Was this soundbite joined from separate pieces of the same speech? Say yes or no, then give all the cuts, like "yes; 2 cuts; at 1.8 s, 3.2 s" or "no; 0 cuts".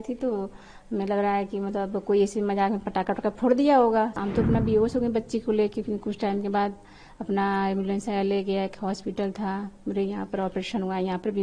yes; 1 cut; at 4.1 s